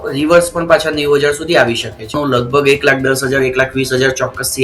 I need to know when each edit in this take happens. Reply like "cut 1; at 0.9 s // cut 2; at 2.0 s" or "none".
cut 1; at 2.1 s